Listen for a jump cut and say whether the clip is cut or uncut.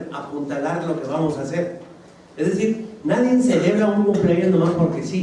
uncut